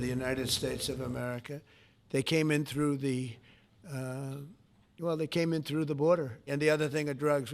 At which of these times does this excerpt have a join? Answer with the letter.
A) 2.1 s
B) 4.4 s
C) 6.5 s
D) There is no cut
C